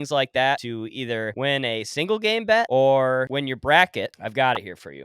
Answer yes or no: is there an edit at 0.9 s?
yes